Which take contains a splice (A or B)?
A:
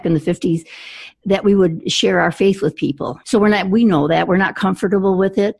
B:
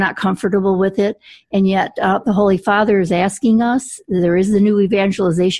A